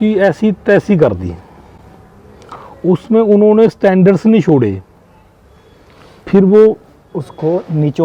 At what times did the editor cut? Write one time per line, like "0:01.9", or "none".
none